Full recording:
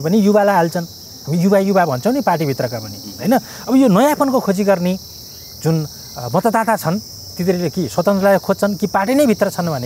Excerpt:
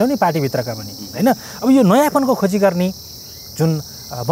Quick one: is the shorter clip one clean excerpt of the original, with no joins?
yes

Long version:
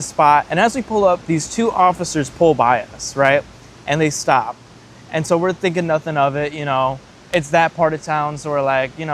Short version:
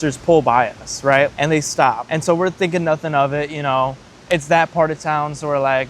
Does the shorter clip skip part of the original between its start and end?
yes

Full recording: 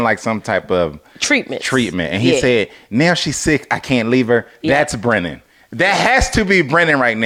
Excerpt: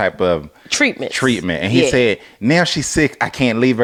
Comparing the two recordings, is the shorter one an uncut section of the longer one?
yes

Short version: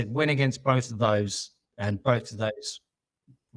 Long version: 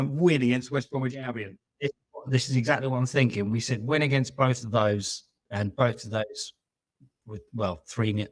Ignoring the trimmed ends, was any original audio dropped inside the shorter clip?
no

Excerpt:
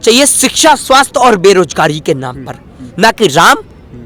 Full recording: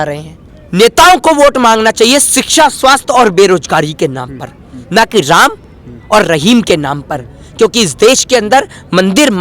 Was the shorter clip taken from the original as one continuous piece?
yes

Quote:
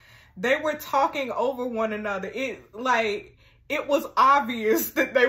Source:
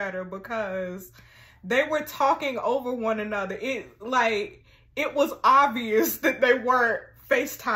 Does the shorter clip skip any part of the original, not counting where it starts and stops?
no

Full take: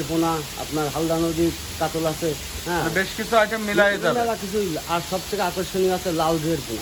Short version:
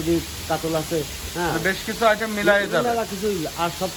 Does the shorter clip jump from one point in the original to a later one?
no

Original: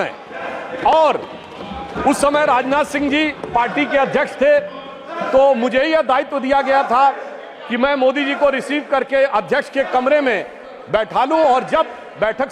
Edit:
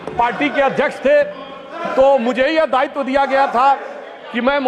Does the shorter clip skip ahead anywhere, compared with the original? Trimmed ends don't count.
no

